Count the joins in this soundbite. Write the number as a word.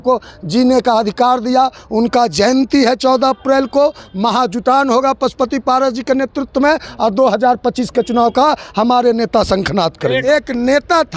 one